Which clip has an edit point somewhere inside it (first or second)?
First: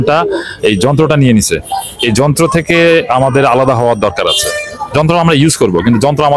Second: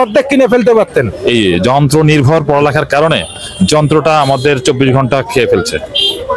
second